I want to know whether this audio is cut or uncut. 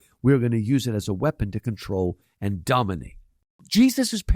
cut